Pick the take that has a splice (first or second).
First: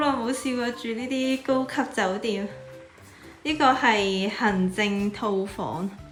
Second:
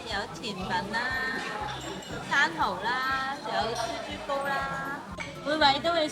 second